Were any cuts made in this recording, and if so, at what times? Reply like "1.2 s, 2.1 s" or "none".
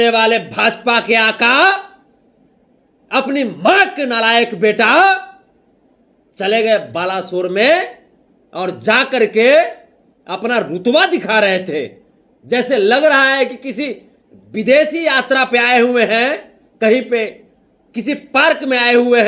none